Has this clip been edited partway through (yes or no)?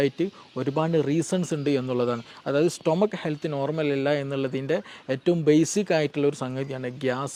no